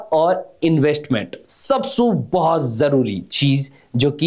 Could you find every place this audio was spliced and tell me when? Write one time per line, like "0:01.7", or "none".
none